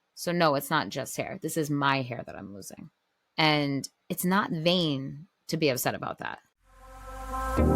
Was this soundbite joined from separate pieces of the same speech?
yes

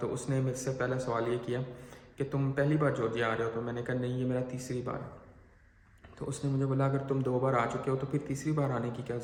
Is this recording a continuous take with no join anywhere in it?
yes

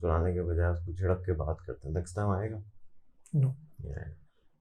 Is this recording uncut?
yes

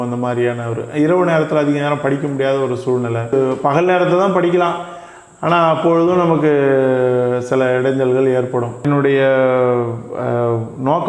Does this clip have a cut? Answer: yes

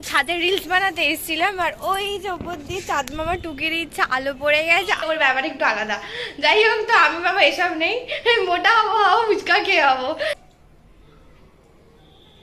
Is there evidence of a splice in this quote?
yes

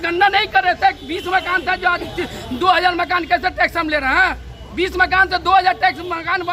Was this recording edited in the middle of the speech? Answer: no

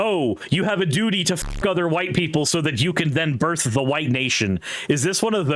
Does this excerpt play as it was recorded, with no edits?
yes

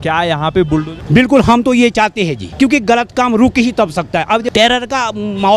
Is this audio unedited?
no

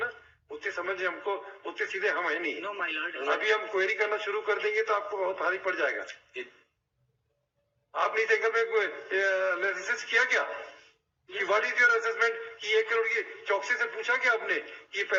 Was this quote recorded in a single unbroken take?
yes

